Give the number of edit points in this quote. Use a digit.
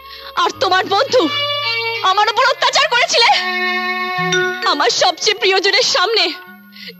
0